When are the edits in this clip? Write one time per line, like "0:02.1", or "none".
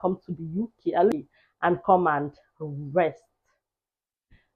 0:01.1